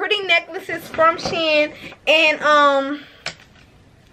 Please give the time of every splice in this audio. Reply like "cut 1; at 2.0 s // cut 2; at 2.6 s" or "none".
none